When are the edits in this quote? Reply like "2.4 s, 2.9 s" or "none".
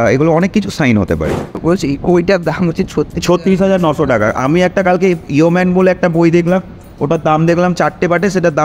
1.6 s